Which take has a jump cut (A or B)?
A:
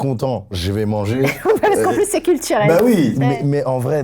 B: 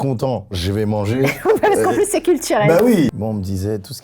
B